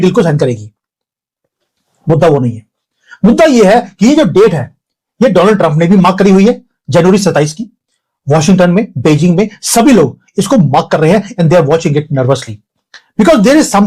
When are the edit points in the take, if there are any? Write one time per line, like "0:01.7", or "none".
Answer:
none